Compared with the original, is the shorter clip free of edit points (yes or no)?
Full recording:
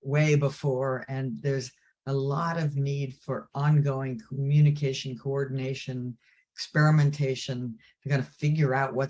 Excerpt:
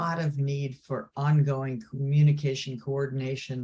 yes